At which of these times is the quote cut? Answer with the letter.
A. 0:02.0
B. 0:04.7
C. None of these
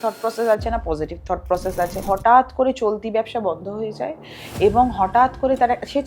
A